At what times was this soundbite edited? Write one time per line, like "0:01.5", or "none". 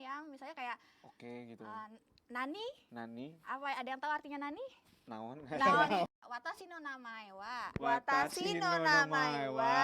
0:02.8
0:06.1